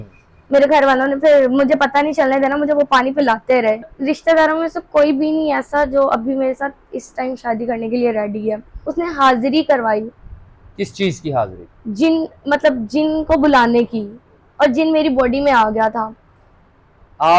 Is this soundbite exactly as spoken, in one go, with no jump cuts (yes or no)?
no